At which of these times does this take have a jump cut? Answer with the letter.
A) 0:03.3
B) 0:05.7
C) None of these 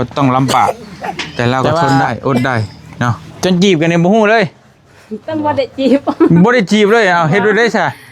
A